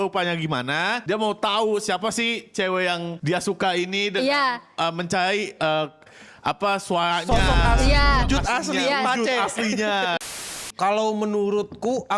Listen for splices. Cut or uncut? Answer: cut